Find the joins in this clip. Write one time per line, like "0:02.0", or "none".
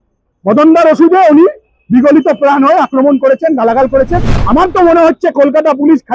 0:04.3